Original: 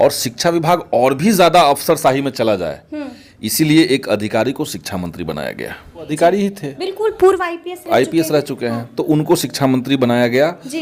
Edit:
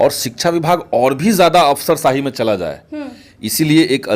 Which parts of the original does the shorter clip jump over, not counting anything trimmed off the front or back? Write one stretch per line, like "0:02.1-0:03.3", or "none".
none